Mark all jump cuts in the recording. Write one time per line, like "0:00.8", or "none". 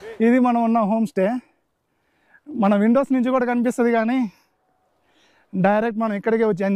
none